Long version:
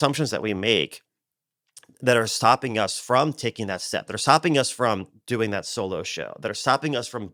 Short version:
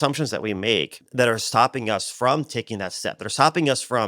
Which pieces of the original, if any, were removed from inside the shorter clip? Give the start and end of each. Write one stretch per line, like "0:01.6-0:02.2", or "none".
0:01.0-0:01.9